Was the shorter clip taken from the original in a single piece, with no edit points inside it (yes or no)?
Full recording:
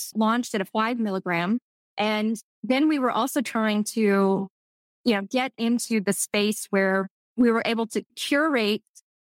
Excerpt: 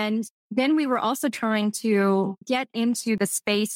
no